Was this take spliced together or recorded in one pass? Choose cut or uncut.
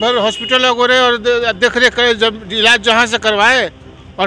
uncut